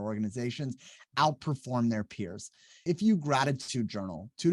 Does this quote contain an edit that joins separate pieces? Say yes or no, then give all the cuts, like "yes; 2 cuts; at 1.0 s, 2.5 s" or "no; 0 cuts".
yes; 1 cut; at 2.8 s